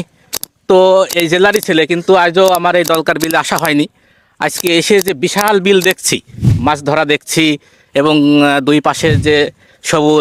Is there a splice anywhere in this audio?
no; 0 cuts

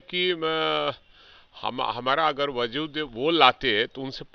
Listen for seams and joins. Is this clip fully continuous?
yes; 0 cuts

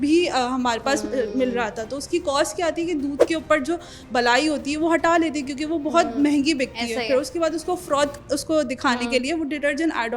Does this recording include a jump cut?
no; 0 cuts

